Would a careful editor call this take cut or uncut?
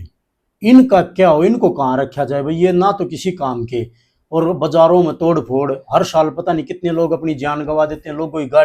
uncut